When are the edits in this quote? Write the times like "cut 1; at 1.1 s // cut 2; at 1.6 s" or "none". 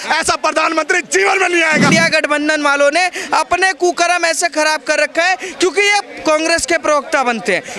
cut 1; at 1.9 s